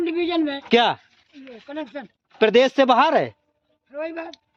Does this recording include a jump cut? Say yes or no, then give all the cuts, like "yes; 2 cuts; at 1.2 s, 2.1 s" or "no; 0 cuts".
no; 0 cuts